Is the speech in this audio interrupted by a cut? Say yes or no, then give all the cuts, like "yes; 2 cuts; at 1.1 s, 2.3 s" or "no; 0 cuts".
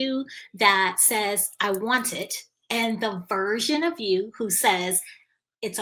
no; 0 cuts